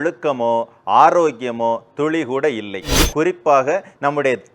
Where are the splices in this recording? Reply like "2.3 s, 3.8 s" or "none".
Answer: 3.0 s